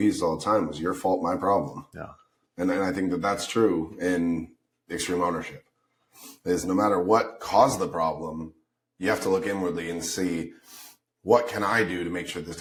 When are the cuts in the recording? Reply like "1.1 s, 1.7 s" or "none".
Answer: none